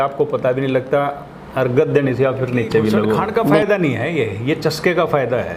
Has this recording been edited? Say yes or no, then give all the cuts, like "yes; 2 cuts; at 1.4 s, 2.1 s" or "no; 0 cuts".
yes; 1 cut; at 3.4 s